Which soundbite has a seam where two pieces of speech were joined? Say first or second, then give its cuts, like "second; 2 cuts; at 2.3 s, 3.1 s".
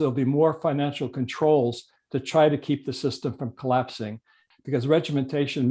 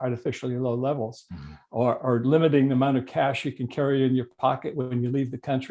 first; 1 cut; at 4.4 s